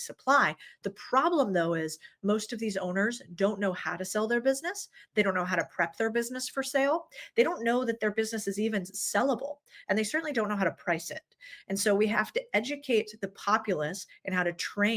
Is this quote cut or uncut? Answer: uncut